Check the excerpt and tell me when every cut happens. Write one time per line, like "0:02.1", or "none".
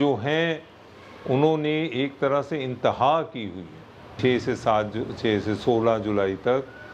0:04.2